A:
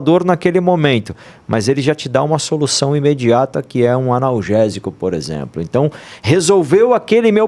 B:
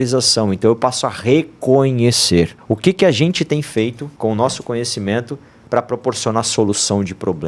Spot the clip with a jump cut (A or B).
B